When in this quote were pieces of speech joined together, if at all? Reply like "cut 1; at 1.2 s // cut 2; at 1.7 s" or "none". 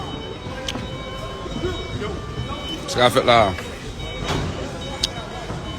cut 1; at 1.5 s